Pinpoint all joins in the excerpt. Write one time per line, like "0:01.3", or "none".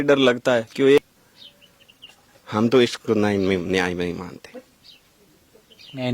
0:01.0